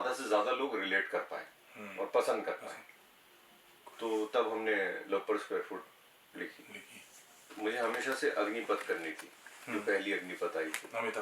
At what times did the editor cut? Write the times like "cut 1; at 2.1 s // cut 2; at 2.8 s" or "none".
cut 1; at 7.5 s